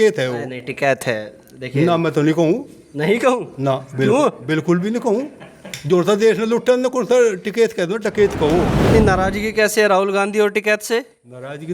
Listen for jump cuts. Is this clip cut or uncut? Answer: cut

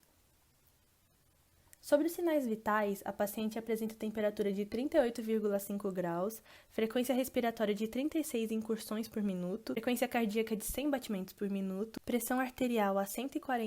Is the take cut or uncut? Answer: cut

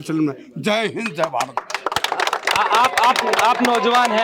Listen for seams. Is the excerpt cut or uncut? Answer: uncut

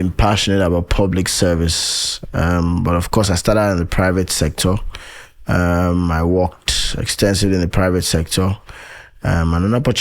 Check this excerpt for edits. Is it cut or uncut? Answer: uncut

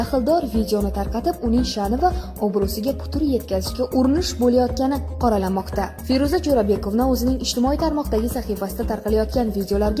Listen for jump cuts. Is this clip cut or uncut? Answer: uncut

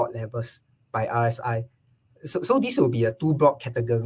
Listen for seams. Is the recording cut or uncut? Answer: uncut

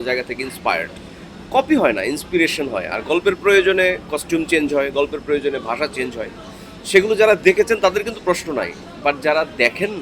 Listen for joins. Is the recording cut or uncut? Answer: uncut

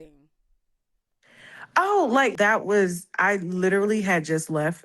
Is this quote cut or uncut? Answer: cut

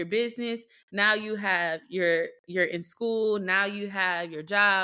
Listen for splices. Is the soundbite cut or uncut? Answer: uncut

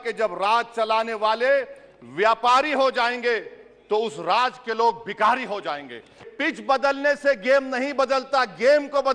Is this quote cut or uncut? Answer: cut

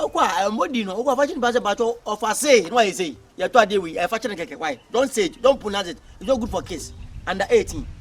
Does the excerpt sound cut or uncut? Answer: uncut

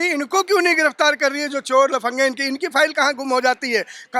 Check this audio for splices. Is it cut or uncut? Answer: uncut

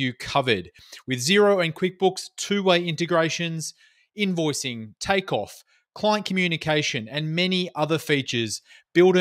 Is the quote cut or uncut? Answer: uncut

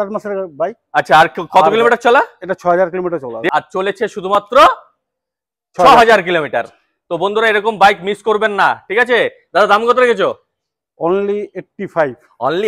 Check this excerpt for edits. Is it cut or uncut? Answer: uncut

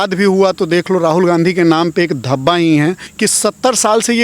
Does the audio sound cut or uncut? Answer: cut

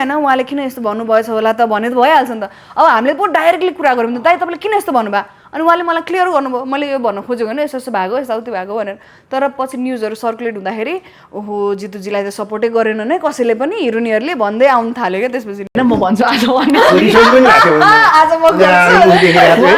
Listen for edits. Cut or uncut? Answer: cut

